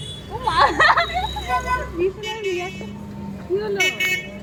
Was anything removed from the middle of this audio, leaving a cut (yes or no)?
no